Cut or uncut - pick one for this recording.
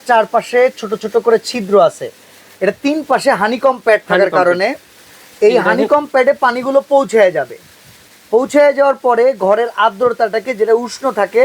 uncut